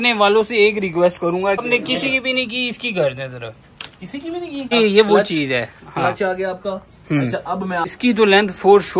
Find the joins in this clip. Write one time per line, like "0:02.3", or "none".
0:01.6
0:04.7
0:07.9